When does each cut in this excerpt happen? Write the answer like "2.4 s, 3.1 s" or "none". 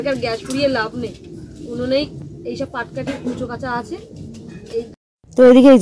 4.9 s